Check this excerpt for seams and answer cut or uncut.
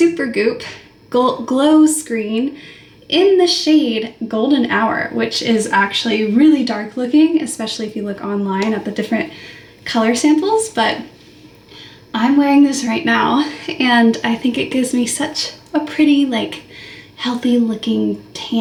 uncut